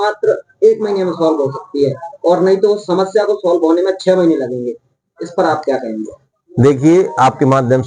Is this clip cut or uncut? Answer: uncut